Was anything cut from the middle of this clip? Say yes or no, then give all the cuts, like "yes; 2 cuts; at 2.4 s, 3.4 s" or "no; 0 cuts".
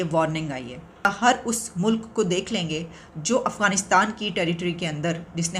yes; 1 cut; at 1.1 s